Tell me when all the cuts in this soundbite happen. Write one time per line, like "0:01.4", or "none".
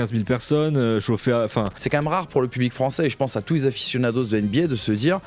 0:01.7